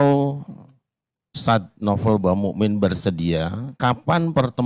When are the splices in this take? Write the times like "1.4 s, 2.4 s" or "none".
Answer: 3.6 s